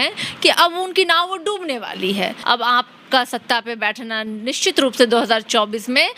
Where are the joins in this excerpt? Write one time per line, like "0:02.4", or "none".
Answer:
0:02.4

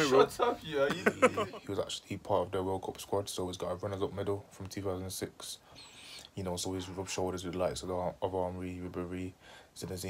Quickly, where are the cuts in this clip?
0:01.4

